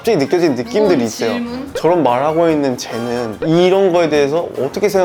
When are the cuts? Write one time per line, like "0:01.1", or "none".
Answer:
none